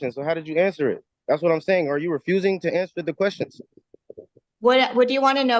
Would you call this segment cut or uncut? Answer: uncut